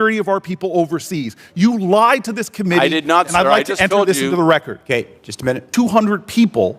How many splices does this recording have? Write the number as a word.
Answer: one